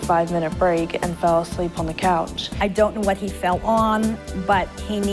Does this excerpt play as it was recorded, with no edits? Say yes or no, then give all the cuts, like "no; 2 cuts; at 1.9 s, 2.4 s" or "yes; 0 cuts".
no; 1 cut; at 2.4 s